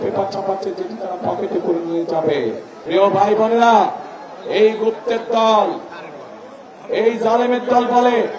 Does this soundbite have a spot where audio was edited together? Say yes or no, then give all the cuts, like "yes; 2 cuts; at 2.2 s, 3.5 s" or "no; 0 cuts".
yes; 1 cut; at 2.7 s